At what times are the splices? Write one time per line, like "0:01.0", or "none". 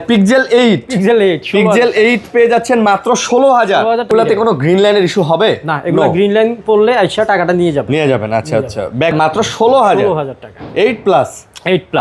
0:04.1
0:09.1